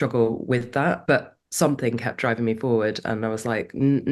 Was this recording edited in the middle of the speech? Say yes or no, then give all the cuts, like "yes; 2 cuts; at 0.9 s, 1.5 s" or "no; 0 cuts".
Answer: yes; 1 cut; at 1.0 s